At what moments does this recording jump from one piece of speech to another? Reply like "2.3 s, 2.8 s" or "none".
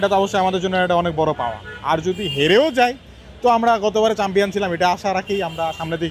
none